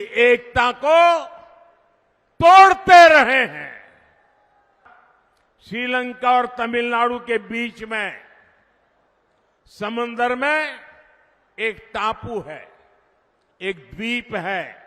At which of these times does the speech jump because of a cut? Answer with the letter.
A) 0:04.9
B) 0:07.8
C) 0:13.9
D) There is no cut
A